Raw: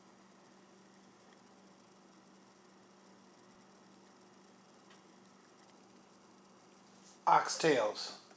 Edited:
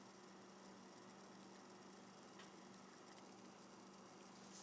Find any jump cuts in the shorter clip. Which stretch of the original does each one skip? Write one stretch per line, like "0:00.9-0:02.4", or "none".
0:03.5-0:03.6